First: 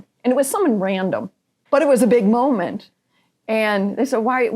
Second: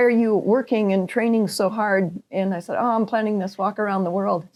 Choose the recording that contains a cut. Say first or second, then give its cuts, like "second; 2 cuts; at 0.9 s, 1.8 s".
first; 1 cut; at 1.6 s